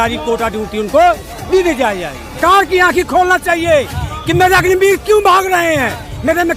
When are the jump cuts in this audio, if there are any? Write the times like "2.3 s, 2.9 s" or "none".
2.4 s